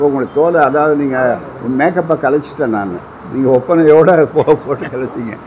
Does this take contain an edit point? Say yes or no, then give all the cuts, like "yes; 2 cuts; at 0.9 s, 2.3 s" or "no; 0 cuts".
no; 0 cuts